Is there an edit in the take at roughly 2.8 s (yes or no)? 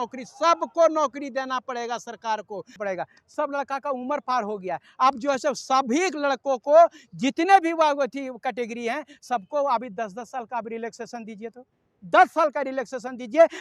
yes